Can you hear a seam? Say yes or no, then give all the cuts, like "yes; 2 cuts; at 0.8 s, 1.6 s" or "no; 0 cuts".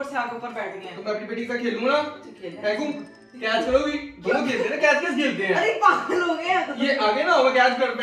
no; 0 cuts